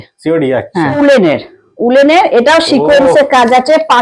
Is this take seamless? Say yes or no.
no